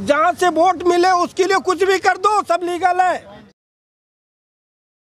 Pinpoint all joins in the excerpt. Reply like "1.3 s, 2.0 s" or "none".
none